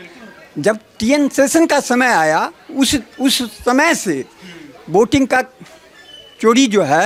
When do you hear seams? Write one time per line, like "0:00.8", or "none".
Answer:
none